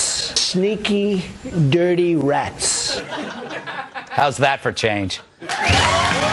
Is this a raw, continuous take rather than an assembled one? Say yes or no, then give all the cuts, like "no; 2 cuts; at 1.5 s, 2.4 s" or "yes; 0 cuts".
no; 1 cut; at 2.6 s